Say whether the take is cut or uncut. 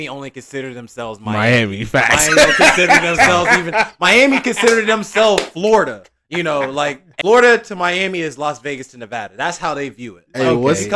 cut